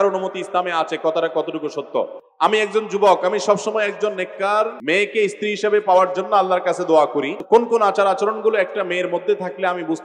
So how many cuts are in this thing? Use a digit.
3